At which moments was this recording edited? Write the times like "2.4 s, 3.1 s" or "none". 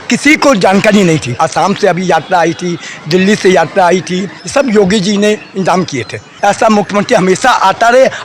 1.4 s, 4.4 s, 6.3 s